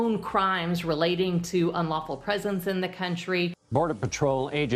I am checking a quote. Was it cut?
yes; 1 cut; at 3.5 s

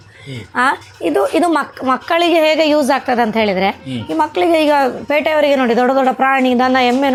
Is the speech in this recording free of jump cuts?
yes; 0 cuts

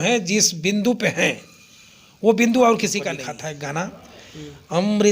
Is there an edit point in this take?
yes; 1 cut; at 3.3 s

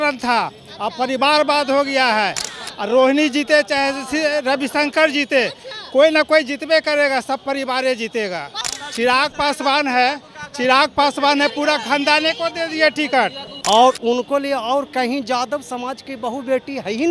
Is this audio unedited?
no; 2 cuts; at 8.5 s, 13.5 s

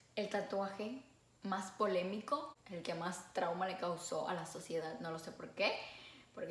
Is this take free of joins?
yes; 0 cuts

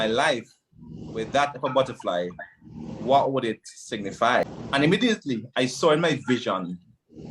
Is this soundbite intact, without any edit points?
no; 1 cut; at 4.5 s

